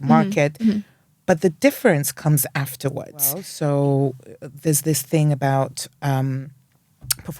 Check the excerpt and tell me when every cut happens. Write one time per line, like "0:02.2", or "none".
0:03.5